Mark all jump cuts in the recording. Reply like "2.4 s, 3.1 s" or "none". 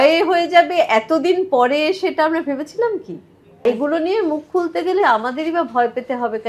3.6 s, 5.0 s